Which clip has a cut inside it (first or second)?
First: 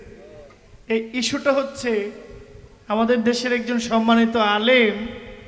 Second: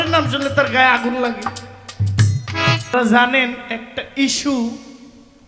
second